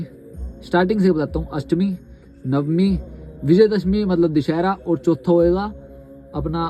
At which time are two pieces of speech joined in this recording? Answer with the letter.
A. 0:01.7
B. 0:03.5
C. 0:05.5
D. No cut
D